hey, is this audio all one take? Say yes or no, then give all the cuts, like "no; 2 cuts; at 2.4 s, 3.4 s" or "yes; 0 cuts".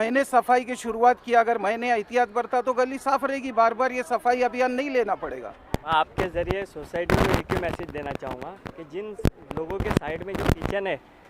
no; 1 cut; at 5.7 s